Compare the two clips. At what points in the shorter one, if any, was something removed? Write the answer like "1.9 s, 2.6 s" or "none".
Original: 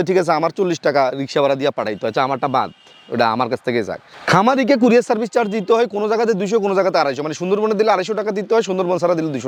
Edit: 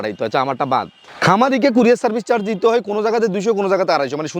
1.0 s